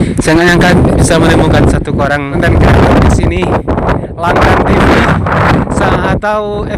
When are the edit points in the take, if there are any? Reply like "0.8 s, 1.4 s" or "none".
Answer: 2.4 s